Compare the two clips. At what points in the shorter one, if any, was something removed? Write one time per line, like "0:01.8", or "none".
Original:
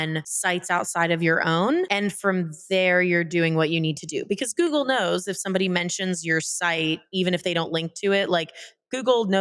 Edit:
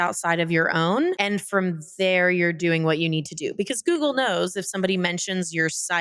none